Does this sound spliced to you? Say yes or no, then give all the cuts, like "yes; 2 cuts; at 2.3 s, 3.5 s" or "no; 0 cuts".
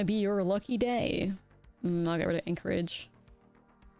no; 0 cuts